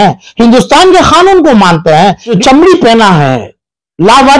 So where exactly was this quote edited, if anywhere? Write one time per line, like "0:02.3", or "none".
0:02.3